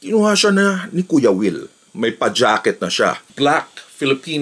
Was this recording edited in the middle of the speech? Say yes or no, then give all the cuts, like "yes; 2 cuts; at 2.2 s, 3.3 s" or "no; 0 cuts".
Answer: yes; 1 cut; at 3.3 s